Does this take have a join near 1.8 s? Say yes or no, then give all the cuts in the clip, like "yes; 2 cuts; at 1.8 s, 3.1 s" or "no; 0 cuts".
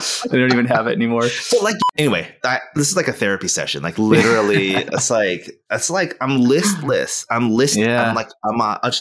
yes; 1 cut; at 1.8 s